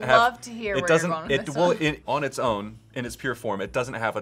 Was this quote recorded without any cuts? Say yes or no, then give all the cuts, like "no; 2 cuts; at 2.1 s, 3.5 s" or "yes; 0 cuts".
no; 1 cut; at 2.0 s